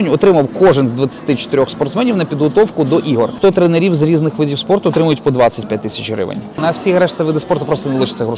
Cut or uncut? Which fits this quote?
cut